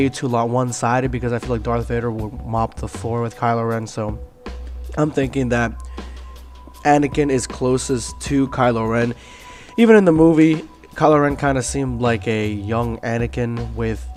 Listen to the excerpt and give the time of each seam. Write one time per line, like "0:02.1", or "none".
none